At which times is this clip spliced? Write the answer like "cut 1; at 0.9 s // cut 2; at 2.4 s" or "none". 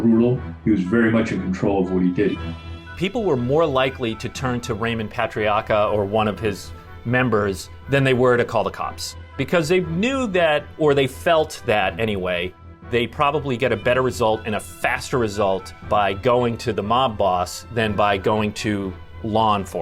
cut 1; at 2.3 s // cut 2; at 9.4 s // cut 3; at 12.8 s // cut 4; at 15.7 s